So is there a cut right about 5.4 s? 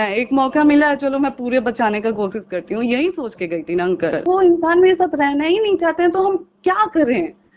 no; 1 cut; at 4.2 s

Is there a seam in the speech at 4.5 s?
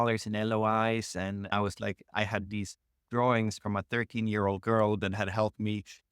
no; 1 cut; at 1.5 s

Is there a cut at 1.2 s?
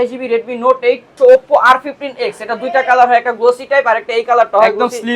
yes; 1 cut; at 1.2 s

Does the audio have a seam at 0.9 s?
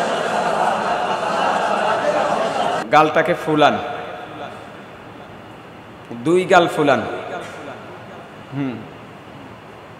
no; 1 cut; at 2.8 s

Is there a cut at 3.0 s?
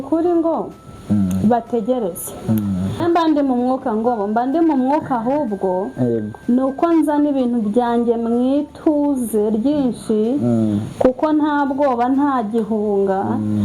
yes; 1 cut; at 3.0 s

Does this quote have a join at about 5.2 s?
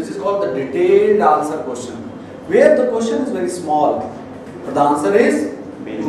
yes; 1 cut; at 5.2 s

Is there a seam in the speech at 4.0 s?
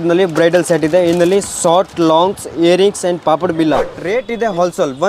yes; 1 cut; at 4.0 s

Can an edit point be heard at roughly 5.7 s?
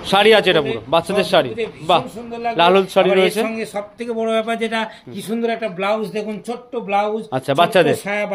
no; 0 cuts

